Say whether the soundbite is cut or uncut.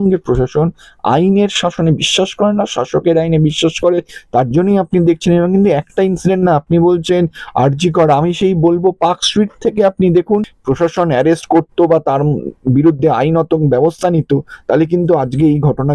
cut